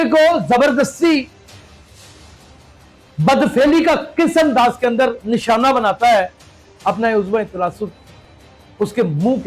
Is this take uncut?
yes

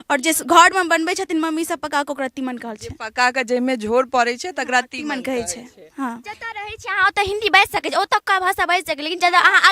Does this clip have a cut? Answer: yes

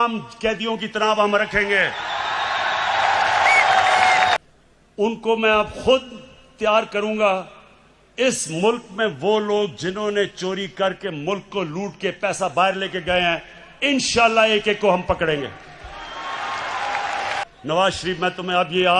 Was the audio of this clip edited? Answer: yes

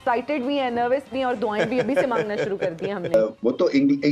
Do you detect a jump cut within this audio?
yes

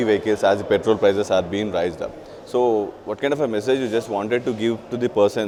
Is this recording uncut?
yes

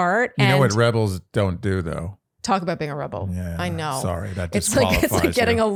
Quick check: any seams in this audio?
no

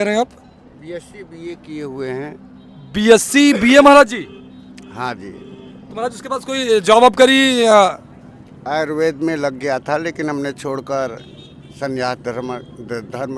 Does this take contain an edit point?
no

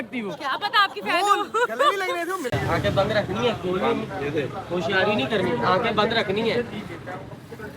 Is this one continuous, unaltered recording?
no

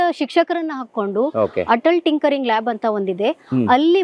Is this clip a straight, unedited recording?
yes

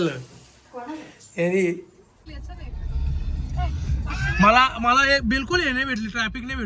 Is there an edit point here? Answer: yes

